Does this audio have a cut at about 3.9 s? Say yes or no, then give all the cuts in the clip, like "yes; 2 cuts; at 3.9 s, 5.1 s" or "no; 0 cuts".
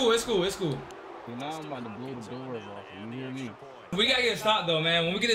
yes; 2 cuts; at 0.9 s, 3.9 s